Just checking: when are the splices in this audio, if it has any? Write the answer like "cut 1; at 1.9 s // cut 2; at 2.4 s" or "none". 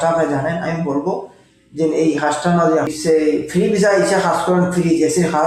cut 1; at 2.9 s